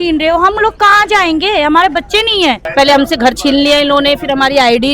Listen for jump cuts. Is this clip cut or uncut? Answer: cut